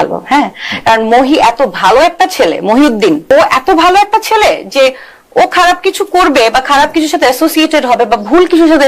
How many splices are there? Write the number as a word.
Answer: one